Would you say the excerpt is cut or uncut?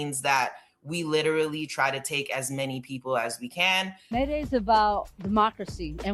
cut